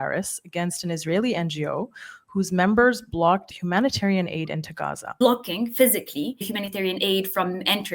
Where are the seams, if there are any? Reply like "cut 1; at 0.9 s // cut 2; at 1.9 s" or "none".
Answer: cut 1; at 3.5 s // cut 2; at 5.0 s // cut 3; at 6.5 s